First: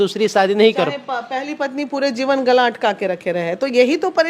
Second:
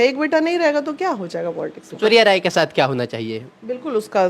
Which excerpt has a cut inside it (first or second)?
second